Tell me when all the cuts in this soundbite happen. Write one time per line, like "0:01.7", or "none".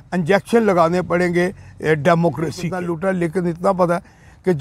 0:02.7